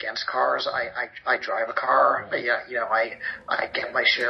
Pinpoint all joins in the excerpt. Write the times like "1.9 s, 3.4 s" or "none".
none